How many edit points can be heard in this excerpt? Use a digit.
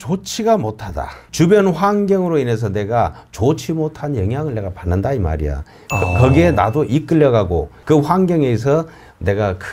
0